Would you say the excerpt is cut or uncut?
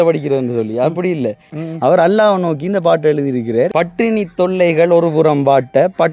cut